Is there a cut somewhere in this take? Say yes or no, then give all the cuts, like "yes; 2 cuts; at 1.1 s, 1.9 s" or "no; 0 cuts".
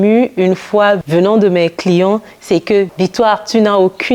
yes; 2 cuts; at 1.0 s, 2.9 s